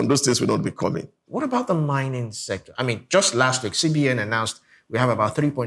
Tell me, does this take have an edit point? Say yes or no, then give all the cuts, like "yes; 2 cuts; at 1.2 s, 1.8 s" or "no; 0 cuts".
yes; 1 cut; at 1.2 s